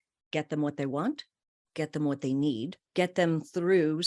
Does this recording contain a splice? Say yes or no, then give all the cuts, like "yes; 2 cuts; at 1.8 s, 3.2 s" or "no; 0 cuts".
yes; 1 cut; at 2.8 s